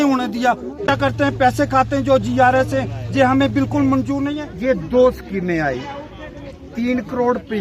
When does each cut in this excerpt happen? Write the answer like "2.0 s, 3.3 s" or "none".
0.9 s, 4.4 s